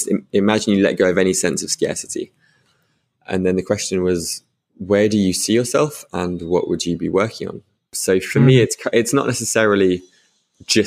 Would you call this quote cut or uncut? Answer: cut